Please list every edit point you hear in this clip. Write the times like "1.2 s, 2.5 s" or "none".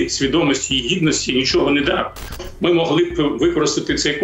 2.4 s